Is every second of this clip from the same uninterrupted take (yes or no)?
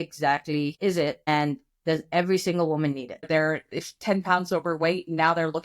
no